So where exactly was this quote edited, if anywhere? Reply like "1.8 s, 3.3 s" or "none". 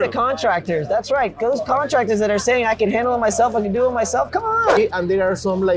4.8 s